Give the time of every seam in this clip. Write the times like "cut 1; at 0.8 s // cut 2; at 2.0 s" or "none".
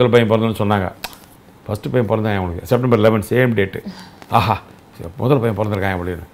none